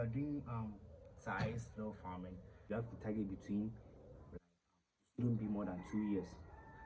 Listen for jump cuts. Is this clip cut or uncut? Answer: cut